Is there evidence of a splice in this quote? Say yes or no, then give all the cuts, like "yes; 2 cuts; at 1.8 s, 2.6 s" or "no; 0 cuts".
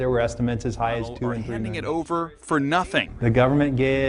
yes; 1 cut; at 1.7 s